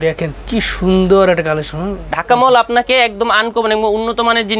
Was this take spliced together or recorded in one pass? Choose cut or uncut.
cut